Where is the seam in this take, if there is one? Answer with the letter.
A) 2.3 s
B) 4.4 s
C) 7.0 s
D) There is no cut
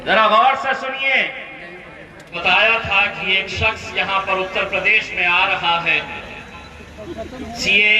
A